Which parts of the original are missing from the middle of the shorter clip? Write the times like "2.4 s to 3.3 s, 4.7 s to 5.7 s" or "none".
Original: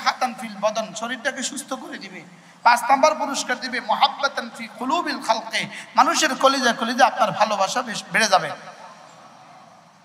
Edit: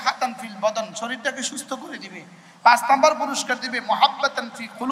none